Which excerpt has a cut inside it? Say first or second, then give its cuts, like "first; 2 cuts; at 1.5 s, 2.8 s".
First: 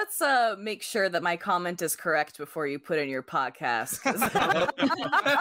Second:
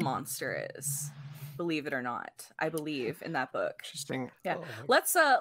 second; 1 cut; at 4.3 s